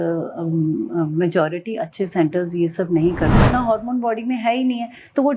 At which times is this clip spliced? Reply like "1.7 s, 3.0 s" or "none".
3.3 s